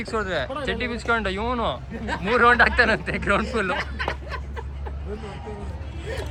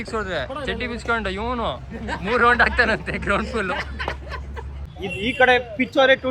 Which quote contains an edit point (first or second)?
second